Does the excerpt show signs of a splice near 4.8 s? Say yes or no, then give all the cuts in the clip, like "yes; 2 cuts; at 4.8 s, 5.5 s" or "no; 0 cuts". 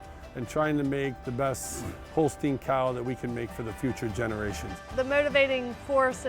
yes; 1 cut; at 4.8 s